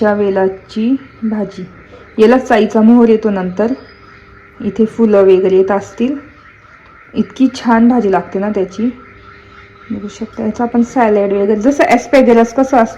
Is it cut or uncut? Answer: uncut